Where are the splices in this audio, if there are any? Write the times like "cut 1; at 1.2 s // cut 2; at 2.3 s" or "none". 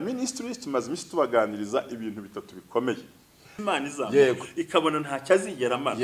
cut 1; at 3.5 s